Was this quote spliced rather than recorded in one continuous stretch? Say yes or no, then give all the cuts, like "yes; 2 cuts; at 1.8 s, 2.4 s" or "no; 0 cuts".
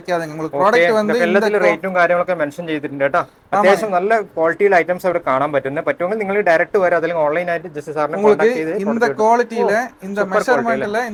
no; 0 cuts